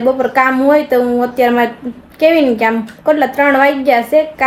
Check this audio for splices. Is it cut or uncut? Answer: uncut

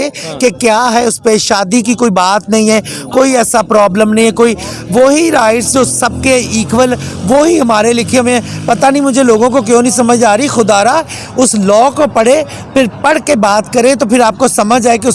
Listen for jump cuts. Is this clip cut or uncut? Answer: uncut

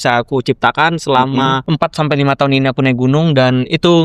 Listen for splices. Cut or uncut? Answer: cut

